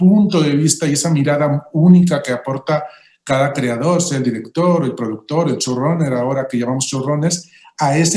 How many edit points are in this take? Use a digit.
0